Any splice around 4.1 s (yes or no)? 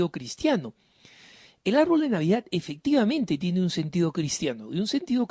yes